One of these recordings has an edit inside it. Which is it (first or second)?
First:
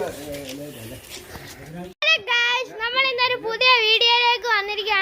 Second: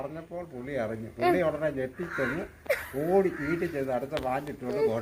first